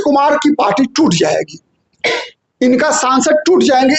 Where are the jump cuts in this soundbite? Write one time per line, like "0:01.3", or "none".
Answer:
none